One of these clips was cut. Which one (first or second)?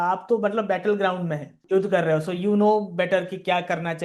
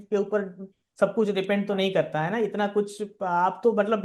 first